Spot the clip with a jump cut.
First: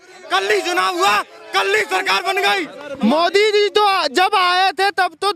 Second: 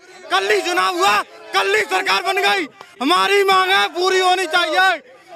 first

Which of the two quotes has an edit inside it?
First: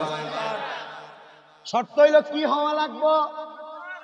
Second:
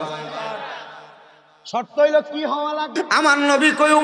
second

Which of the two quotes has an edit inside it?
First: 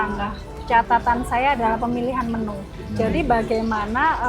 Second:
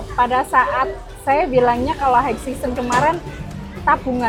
first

